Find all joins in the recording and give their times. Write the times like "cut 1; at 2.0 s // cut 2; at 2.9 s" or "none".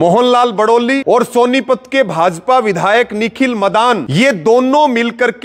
cut 1; at 1.0 s // cut 2; at 4.1 s